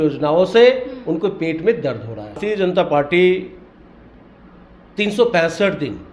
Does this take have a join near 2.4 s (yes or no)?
yes